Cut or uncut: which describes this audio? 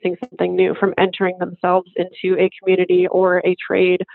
uncut